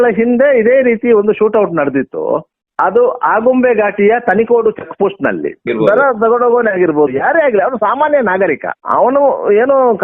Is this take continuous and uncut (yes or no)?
no